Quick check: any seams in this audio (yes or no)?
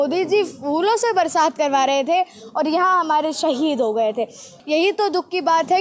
yes